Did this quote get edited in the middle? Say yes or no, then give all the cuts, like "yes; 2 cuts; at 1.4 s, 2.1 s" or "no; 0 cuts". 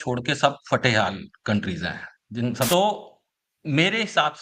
yes; 1 cut; at 2.7 s